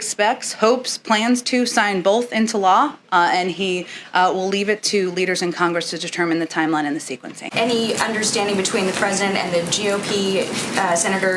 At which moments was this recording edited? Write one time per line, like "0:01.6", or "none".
0:07.5